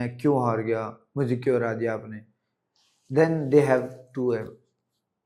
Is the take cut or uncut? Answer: uncut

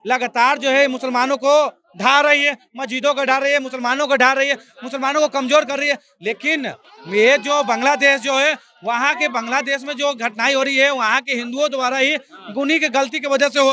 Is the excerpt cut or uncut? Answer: uncut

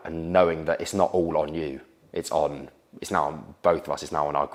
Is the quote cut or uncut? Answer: uncut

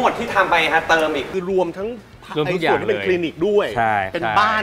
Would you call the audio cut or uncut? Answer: cut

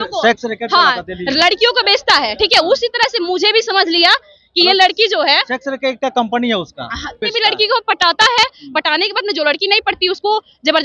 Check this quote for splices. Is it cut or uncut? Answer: cut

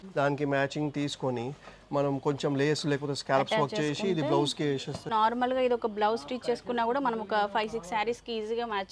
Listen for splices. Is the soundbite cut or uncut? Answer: cut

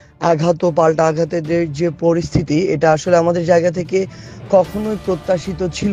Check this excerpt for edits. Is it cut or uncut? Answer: uncut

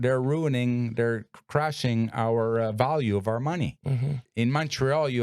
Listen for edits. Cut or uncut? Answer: cut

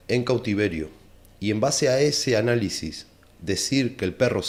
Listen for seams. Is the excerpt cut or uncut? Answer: uncut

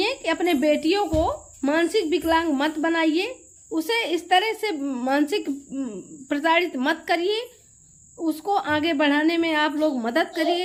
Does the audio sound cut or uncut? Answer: uncut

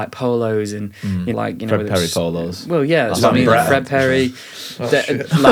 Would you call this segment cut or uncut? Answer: cut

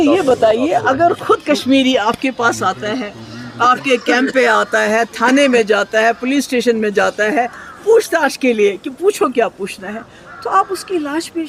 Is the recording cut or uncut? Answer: uncut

